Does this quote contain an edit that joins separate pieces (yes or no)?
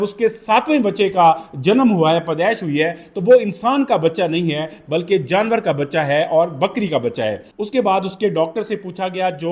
no